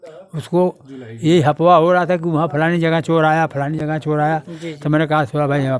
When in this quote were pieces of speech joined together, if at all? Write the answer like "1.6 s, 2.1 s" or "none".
none